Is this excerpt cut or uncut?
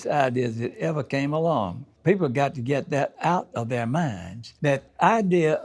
uncut